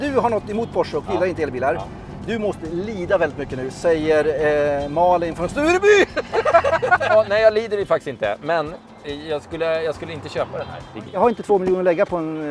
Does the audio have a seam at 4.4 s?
no; 2 cuts; at 7.1 s, 11.0 s

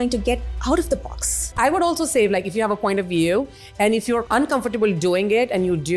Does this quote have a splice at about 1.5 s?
yes; 2 cuts; at 1.5 s, 4.2 s

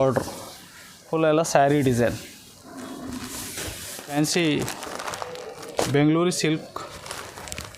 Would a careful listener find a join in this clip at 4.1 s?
yes; 1 cut; at 4.1 s

